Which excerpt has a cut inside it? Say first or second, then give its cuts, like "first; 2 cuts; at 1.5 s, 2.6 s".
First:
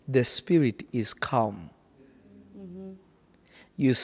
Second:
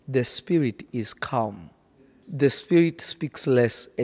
second; 1 cut; at 2.2 s